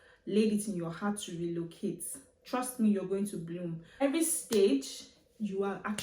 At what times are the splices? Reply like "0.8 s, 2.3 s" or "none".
3.8 s